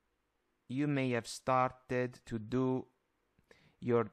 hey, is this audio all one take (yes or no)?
yes